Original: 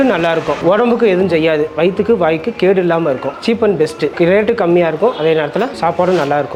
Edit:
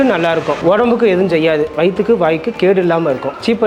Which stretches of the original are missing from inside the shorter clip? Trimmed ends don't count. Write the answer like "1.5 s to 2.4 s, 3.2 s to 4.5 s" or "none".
none

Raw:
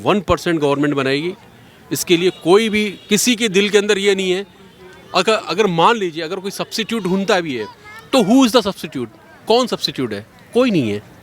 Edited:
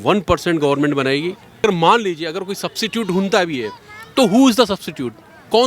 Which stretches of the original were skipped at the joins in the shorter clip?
1.6 s to 5.5 s

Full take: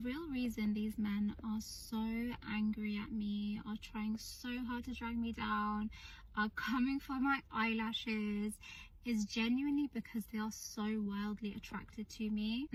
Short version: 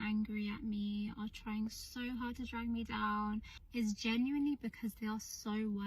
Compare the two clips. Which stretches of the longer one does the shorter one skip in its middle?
6.0 s to 8.9 s

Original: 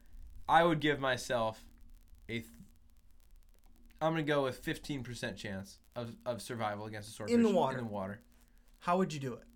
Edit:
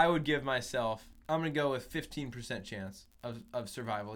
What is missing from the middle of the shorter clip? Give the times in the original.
1.7 s to 3.8 s

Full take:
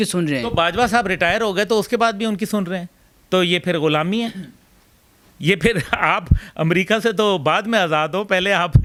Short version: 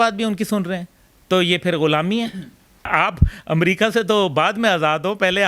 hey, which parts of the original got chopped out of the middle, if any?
4.8 s to 5.9 s

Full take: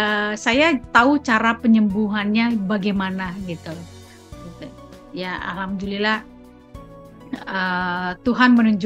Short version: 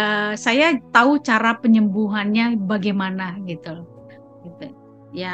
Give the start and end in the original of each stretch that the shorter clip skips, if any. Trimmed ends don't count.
none

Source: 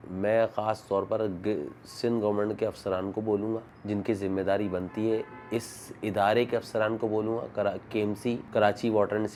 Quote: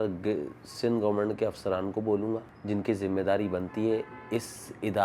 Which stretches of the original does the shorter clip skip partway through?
none

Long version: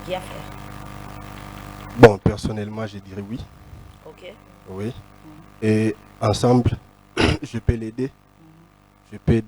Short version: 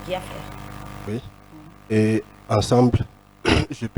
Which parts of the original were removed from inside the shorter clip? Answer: 1.1 s to 4.8 s

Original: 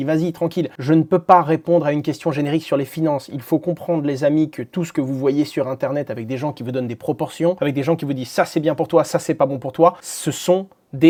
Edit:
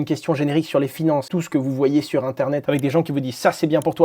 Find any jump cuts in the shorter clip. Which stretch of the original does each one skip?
3.3 s to 4.7 s, 6.1 s to 7.6 s

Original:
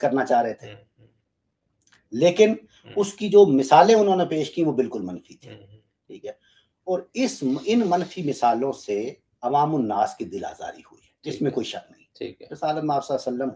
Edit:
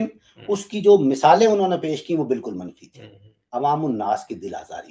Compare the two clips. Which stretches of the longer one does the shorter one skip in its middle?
5.8 s to 9.2 s

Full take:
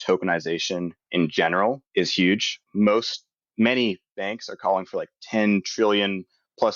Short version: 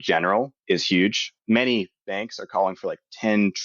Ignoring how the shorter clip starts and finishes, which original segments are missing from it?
2.2 s to 3.0 s

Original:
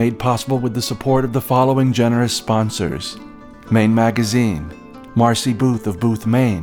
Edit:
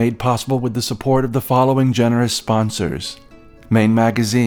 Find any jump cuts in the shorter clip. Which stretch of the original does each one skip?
none

